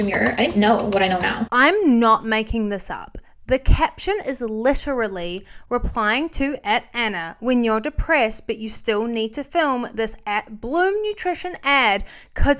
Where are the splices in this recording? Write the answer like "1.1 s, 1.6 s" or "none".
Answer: 1.4 s

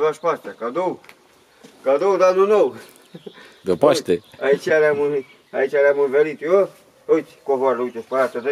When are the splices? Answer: none

